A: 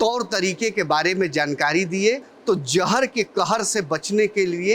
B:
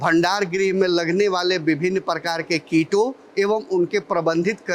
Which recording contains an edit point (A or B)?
A